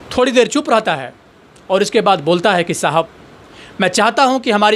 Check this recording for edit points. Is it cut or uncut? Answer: uncut